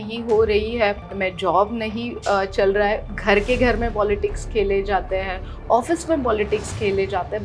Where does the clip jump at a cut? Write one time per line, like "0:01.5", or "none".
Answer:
0:01.0

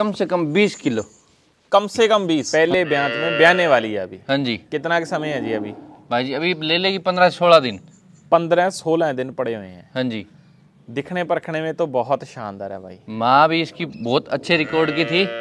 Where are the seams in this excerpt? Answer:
0:02.5

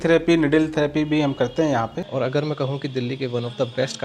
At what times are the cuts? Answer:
0:02.0

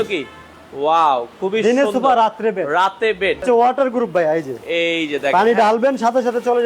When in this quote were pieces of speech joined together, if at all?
0:03.4

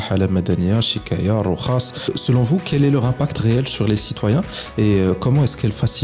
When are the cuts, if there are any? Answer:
0:02.1

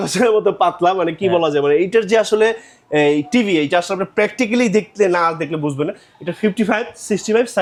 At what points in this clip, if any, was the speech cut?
none

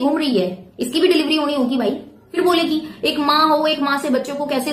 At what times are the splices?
0:02.2

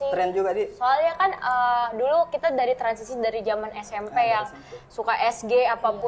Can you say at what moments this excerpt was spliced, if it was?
none

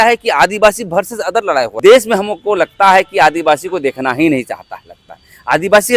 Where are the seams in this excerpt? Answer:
0:01.7

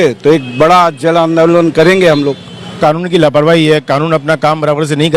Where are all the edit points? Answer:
0:02.8

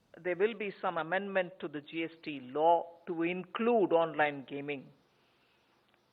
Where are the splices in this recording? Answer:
0:00.9

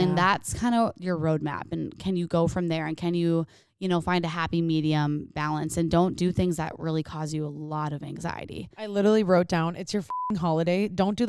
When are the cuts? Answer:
none

